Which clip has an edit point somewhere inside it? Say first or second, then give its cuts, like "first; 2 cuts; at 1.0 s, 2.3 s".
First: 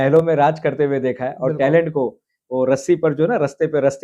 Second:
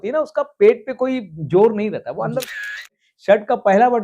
second; 1 cut; at 2.6 s